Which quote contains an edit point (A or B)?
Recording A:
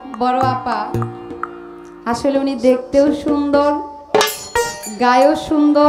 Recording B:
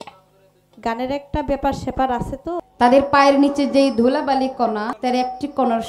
B